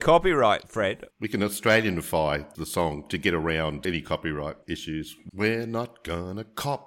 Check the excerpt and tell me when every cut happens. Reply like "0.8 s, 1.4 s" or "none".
1.1 s, 2.5 s, 3.8 s, 4.8 s